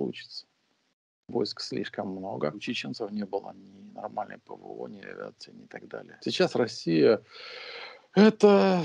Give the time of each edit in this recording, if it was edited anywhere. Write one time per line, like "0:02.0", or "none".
0:02.7
0:06.1